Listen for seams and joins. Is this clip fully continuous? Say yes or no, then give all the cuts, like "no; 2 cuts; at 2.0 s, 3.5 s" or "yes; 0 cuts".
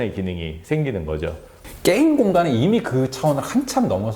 no; 1 cut; at 1.5 s